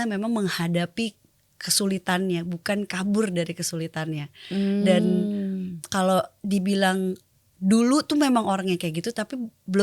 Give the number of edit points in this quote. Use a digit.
0